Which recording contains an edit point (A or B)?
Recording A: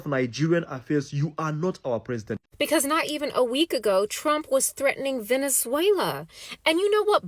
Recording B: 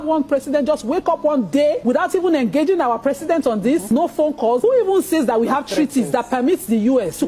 A